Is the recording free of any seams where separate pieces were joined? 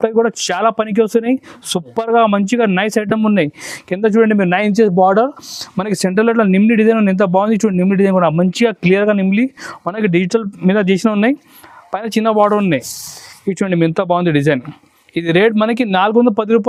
yes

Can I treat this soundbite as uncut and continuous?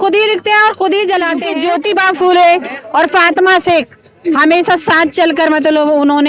no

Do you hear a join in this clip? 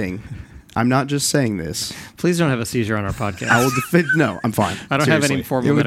no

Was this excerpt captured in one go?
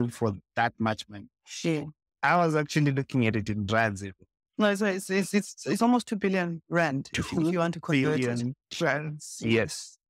yes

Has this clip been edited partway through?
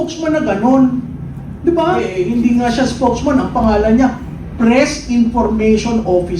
yes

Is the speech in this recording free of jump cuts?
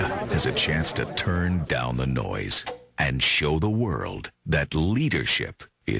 no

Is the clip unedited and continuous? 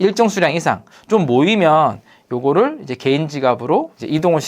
no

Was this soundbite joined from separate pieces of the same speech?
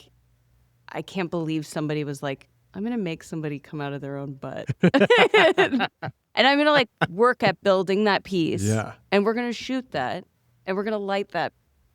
no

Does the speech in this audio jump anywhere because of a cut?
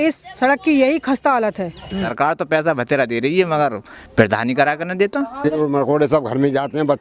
yes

